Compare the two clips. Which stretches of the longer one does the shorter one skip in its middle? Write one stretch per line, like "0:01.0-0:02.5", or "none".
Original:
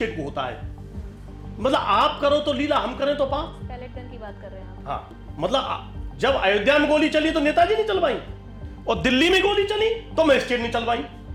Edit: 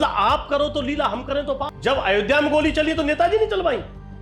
0:03.4-0:06.1